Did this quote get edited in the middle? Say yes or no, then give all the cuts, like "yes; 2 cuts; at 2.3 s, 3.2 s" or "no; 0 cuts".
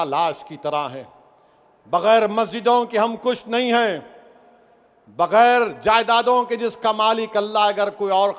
no; 0 cuts